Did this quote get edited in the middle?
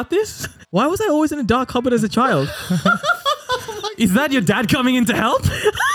no; 0 cuts

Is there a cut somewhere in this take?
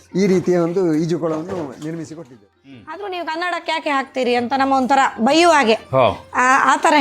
yes; 1 cut; at 2.5 s

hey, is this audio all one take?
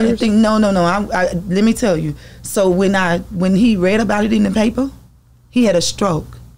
yes; 0 cuts

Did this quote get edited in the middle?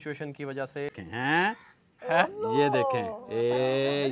yes; 1 cut; at 1.0 s

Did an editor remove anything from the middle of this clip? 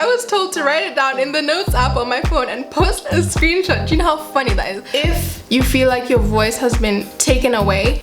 yes; 1 cut; at 4.9 s

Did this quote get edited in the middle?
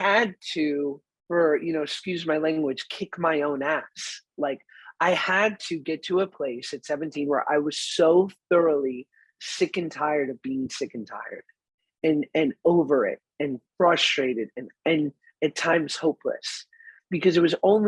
yes; 1 cut; at 1.1 s

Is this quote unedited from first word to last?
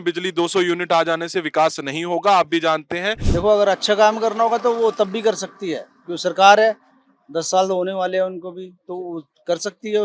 no; 1 cut; at 3.2 s

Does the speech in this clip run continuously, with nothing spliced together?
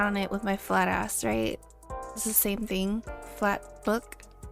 no; 1 cut; at 2.5 s

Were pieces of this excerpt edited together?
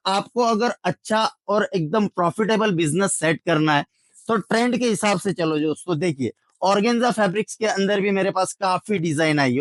no; 0 cuts

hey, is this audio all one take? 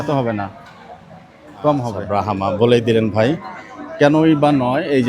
no; 1 cut; at 2.0 s

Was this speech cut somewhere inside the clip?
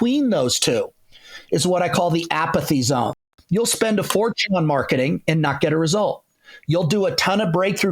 yes; 1 cut; at 3.3 s

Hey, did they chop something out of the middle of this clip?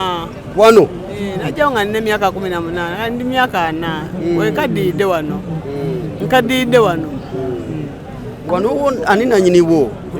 yes; 1 cut; at 8.5 s

